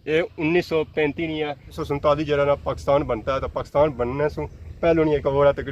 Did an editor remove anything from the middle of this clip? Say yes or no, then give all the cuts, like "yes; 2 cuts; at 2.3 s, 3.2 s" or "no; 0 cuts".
yes; 1 cut; at 1.8 s